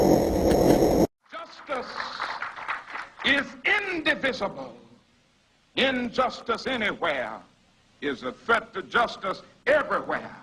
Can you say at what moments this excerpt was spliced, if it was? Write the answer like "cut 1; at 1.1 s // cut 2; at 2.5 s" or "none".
none